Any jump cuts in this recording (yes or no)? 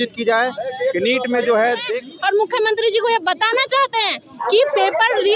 yes